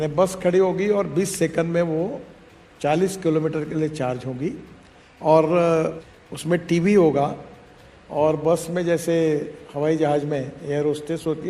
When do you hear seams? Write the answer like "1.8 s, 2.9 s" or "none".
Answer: 6.1 s